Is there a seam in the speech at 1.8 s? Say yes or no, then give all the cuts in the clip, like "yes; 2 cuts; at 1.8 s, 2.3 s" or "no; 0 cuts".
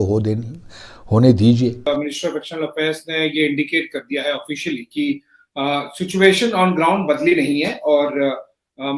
yes; 1 cut; at 1.8 s